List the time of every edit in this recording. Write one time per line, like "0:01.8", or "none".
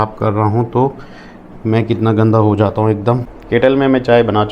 0:03.3